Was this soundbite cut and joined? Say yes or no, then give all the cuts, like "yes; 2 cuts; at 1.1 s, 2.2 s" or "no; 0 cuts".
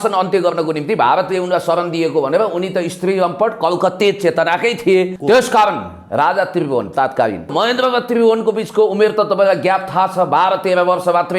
yes; 2 cuts; at 5.2 s, 7.5 s